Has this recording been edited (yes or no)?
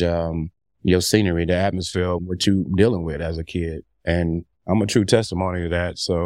yes